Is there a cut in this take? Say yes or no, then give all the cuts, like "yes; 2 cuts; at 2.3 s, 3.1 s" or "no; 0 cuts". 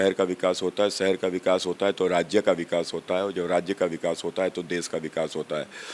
no; 0 cuts